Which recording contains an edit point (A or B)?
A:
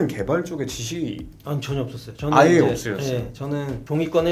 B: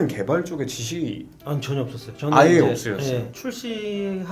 B